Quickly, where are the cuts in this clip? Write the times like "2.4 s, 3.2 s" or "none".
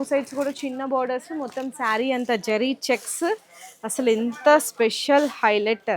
none